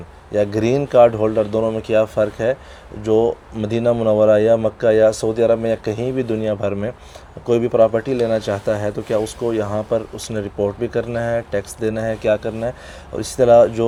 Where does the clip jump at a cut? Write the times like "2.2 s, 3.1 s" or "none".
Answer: none